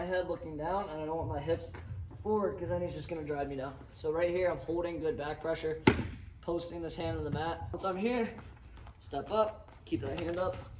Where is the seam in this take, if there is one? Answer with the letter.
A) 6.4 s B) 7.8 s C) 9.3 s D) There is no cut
B